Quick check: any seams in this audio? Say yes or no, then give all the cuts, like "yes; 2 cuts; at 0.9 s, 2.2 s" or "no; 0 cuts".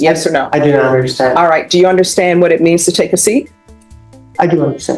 no; 0 cuts